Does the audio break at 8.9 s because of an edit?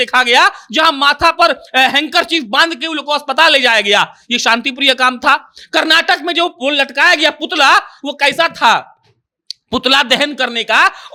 no; 0 cuts

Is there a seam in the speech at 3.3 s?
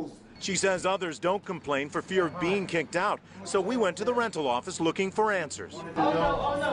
no; 0 cuts

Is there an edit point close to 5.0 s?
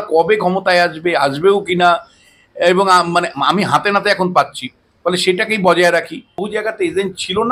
no; 1 cut; at 6.4 s

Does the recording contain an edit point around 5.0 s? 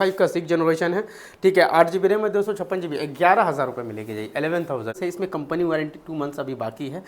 yes; 1 cut; at 5.0 s

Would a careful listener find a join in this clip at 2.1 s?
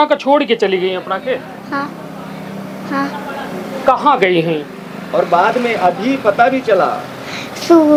no; 0 cuts

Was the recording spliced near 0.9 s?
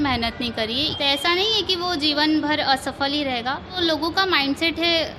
yes; 2 cuts; at 0.9 s, 3.8 s

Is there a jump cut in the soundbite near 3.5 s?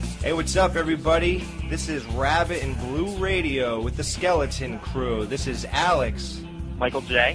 yes; 1 cut; at 3.5 s

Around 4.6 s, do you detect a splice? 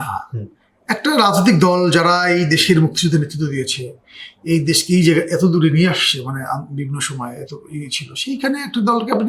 no; 0 cuts

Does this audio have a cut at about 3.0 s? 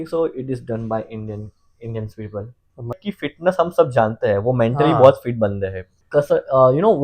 yes; 2 cuts; at 3.0 s, 5.9 s

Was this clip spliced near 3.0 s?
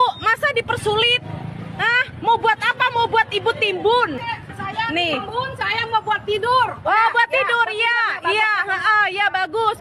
no; 1 cut; at 4.2 s

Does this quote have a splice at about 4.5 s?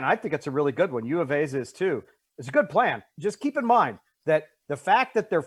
no; 0 cuts

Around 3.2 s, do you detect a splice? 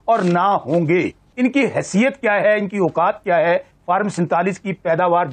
no; 1 cut; at 1.2 s

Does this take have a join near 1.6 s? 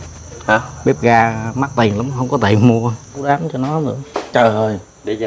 no; 1 cut; at 3.2 s

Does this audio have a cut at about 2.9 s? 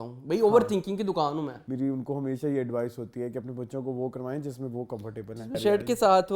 no; 2 cuts; at 1.6 s, 5.6 s

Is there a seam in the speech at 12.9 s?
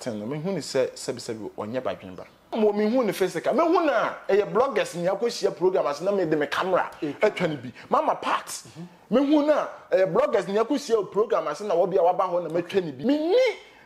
yes; 2 cuts; at 2.5 s, 12.9 s

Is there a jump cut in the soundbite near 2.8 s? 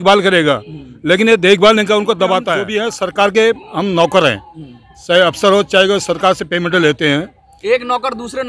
yes; 1 cut; at 2.8 s

